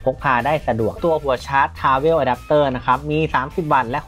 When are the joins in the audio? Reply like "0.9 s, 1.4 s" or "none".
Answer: 1.0 s